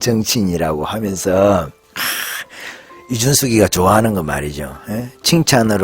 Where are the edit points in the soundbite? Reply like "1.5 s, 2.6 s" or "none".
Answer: 1.8 s